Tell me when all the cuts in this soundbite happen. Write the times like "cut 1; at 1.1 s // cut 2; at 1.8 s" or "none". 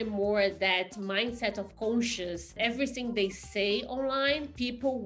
cut 1; at 2.6 s